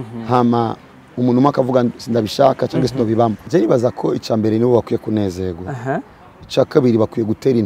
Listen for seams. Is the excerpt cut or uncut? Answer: cut